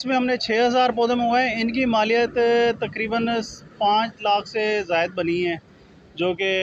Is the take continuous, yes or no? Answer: yes